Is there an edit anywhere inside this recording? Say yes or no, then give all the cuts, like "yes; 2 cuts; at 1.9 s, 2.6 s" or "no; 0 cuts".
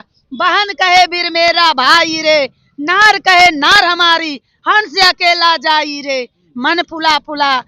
no; 0 cuts